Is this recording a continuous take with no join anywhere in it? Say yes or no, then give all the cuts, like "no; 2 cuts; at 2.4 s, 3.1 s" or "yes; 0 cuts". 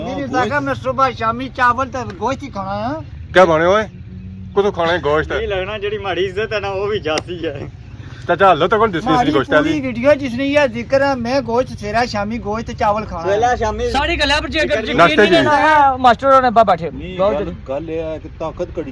no; 1 cut; at 3.1 s